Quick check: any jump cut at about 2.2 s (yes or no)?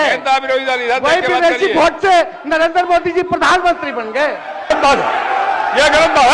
no